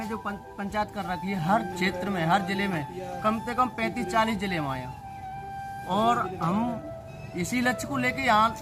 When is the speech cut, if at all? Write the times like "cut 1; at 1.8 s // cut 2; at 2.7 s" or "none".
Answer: none